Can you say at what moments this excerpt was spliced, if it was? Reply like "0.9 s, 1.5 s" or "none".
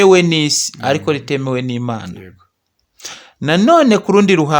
none

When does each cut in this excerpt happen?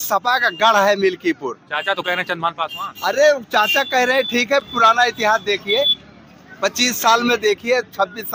none

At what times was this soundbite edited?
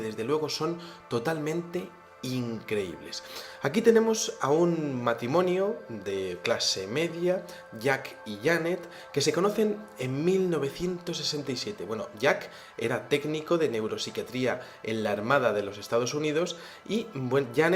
10.1 s

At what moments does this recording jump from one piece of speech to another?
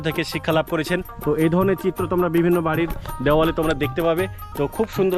1.0 s

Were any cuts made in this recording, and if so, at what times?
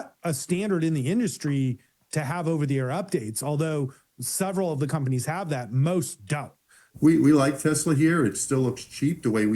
6.9 s

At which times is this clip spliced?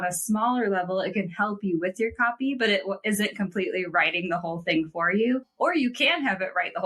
none

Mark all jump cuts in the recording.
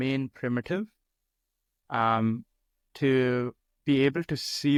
none

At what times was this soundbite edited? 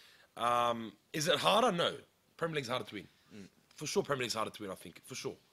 none

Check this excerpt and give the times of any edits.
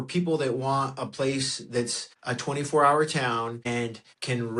2.1 s, 3.7 s

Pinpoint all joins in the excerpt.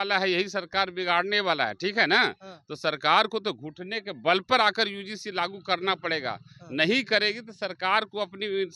none

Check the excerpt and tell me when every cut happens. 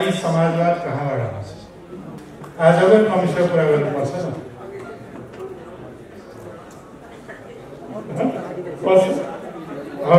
2.2 s

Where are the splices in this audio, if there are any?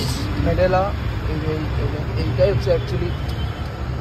none

